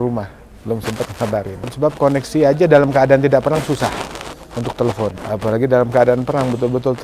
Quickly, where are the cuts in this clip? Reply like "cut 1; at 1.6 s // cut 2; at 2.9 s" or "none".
cut 1; at 1.7 s // cut 2; at 5.2 s